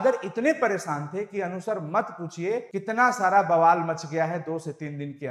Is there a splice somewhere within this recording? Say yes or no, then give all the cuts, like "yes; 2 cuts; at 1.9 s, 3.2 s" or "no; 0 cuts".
no; 0 cuts